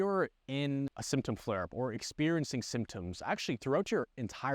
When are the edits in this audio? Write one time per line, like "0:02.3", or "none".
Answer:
0:01.0